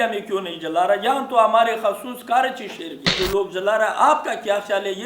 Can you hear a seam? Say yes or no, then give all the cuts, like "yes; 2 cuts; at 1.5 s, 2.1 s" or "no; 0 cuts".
yes; 1 cut; at 3.1 s